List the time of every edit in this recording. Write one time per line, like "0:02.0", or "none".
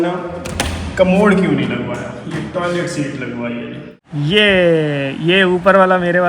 0:04.0